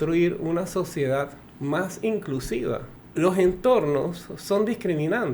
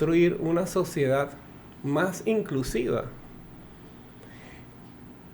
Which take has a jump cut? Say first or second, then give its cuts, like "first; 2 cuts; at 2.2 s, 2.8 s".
first; 2 cuts; at 1.4 s, 3.0 s